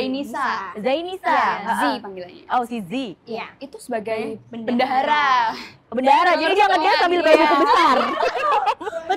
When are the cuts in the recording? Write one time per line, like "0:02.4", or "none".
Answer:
none